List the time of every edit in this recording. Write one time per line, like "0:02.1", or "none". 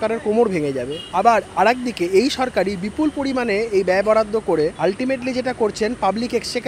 0:01.0
0:04.7